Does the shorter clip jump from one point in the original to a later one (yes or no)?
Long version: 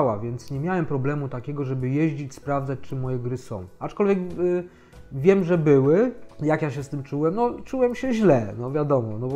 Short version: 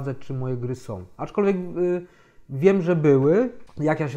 no